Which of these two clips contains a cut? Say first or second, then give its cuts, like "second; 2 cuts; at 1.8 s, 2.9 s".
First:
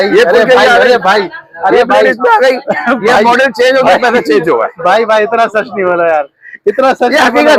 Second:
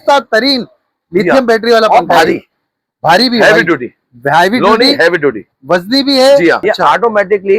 second; 1 cut; at 6.6 s